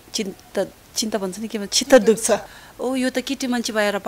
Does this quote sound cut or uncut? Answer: cut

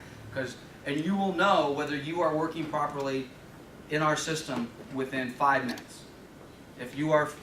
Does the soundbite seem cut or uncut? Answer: cut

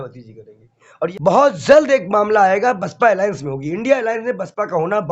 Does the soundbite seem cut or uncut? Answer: cut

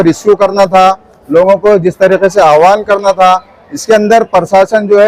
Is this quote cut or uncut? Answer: uncut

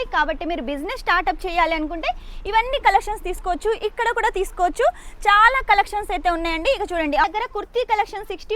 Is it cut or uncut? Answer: cut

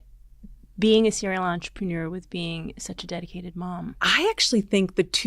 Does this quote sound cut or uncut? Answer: cut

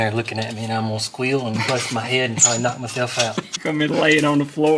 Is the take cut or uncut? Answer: cut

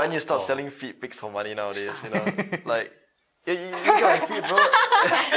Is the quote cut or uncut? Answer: uncut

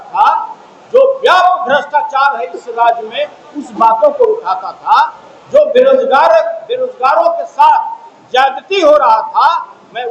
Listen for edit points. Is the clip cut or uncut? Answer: uncut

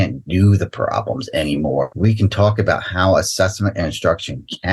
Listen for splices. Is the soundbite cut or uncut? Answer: cut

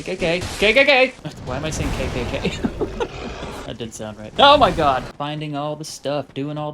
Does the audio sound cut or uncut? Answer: cut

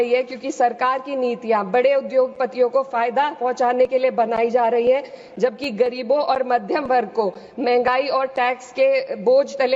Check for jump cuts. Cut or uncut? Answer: uncut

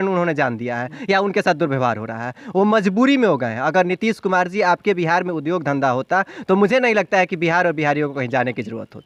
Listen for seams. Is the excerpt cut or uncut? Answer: uncut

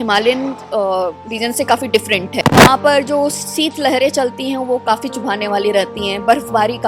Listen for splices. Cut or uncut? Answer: cut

